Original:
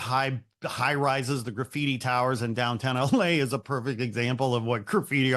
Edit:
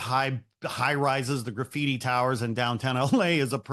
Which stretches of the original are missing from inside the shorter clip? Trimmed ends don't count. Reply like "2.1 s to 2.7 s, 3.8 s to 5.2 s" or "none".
none